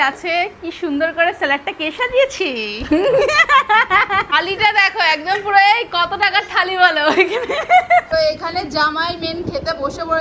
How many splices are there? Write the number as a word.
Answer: two